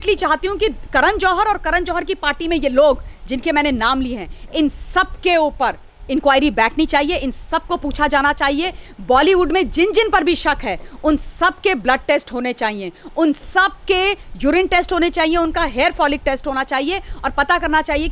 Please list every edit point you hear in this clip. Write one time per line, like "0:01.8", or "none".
none

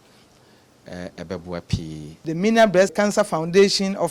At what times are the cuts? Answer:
0:02.3
0:02.9

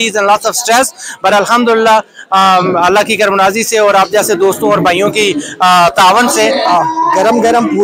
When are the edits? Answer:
0:06.6

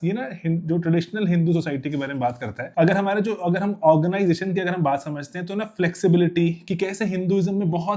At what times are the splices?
0:02.6

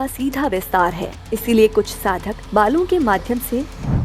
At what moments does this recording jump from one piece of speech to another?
0:01.1
0:02.3

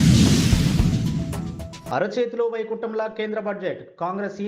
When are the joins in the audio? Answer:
none

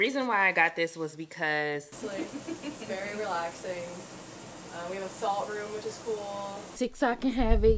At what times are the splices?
0:01.9
0:06.7

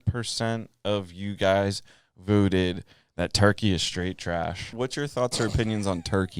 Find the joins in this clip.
0:04.6

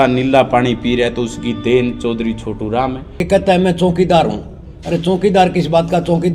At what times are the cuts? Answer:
0:03.3

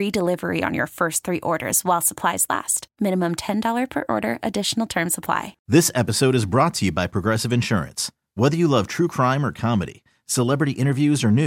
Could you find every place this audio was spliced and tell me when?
0:05.5

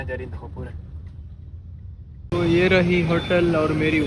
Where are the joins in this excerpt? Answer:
0:01.9

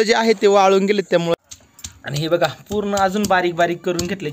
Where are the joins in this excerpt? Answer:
0:01.3

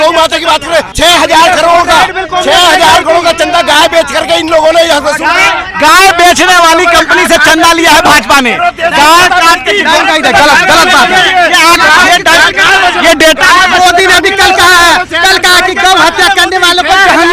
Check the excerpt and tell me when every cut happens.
0:00.9

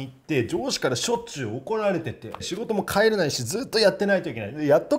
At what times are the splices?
0:02.5

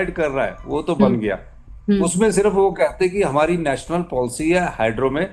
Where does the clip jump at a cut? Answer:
none

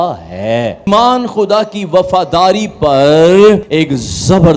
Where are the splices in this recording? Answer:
0:00.9
0:03.7

